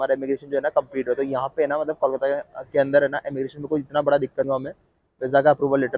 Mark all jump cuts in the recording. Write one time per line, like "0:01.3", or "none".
0:04.5